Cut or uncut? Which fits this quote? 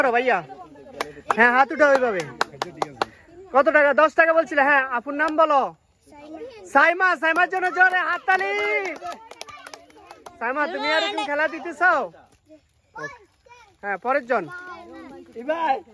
uncut